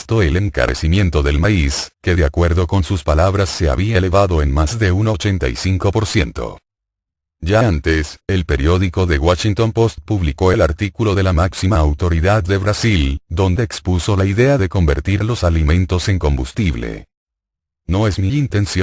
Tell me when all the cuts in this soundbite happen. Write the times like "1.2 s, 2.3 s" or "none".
11.7 s